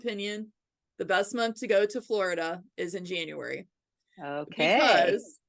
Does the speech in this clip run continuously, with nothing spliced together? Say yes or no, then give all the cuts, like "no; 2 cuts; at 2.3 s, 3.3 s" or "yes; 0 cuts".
yes; 0 cuts